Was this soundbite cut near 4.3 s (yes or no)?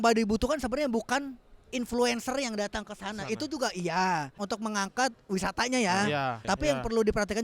yes